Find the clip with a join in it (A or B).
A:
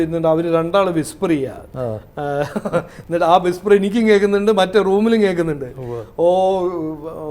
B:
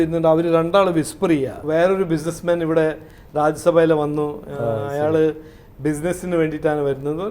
B